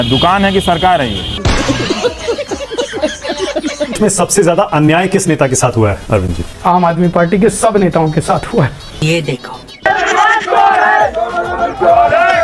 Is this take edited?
yes; 1 cut; at 4.0 s

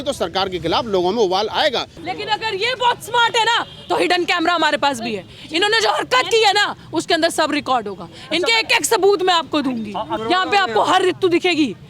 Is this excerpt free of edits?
no; 2 cuts; at 1.9 s, 10.1 s

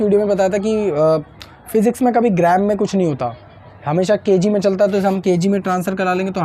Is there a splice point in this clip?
no; 0 cuts

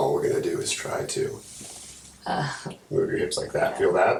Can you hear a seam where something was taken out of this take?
no; 0 cuts

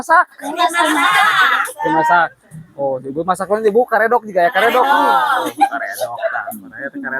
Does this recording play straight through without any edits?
yes; 0 cuts

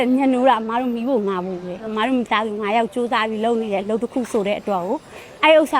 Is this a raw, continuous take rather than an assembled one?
no; 1 cut; at 1.9 s

